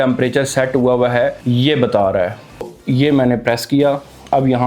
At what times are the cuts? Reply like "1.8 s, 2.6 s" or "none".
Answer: 1.4 s, 2.8 s